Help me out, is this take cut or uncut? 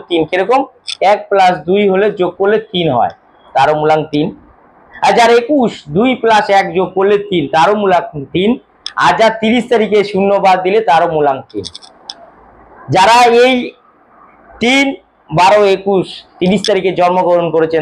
uncut